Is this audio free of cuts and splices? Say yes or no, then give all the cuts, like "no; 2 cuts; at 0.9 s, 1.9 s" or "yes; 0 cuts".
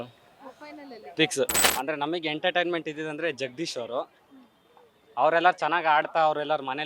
no; 1 cut; at 1.6 s